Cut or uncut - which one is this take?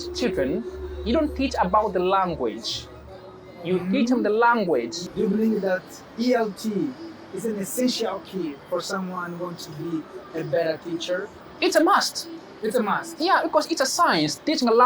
cut